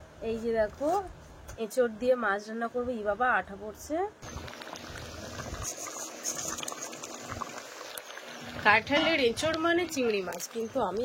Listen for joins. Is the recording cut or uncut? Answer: cut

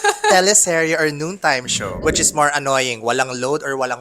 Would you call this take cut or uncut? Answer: cut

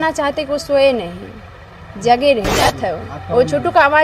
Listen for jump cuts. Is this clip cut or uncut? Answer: cut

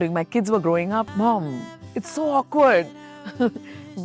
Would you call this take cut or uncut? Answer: cut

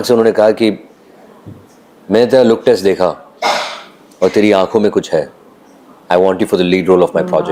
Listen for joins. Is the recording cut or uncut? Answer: uncut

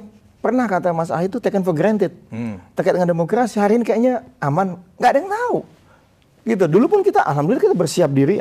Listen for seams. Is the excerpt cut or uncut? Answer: uncut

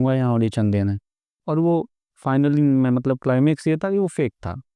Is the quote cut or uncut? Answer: cut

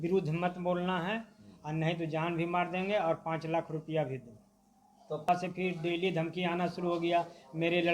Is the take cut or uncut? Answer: cut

